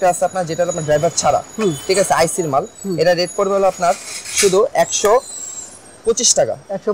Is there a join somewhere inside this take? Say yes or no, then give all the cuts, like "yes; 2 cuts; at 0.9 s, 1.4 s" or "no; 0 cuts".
no; 0 cuts